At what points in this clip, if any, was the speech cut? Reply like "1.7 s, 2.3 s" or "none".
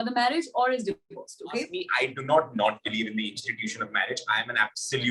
1.8 s